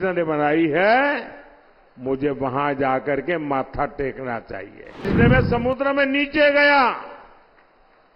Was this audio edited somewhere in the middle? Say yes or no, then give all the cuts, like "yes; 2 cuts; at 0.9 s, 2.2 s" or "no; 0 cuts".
yes; 1 cut; at 5.0 s